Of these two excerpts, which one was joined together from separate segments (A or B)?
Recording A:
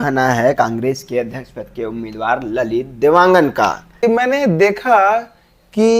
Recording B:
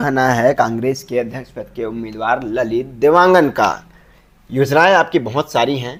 A